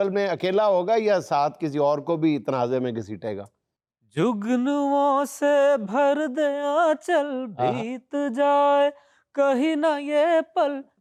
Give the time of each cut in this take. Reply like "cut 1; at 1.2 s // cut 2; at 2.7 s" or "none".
none